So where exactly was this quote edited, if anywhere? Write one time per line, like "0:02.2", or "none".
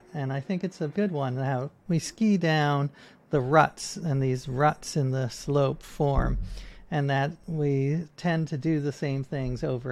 0:00.9
0:01.7
0:07.4